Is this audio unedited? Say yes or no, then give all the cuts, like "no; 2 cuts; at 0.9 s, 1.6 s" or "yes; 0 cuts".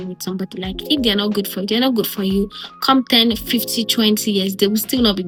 yes; 0 cuts